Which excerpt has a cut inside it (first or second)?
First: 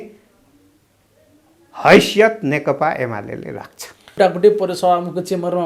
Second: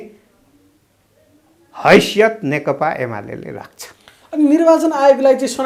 first